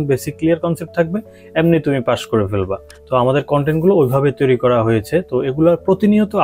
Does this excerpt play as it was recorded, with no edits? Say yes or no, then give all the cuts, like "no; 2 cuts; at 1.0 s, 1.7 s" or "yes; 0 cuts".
yes; 0 cuts